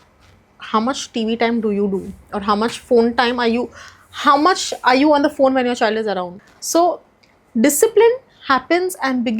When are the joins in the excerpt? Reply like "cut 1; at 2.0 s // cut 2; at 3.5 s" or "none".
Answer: cut 1; at 6.4 s